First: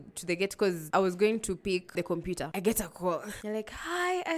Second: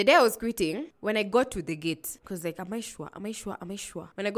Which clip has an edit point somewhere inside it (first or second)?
first